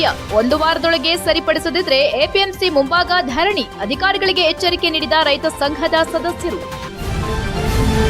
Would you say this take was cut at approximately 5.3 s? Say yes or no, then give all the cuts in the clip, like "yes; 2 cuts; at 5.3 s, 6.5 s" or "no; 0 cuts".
no; 1 cut; at 6.9 s